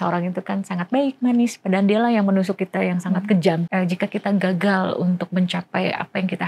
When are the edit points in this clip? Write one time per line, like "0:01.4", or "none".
0:03.7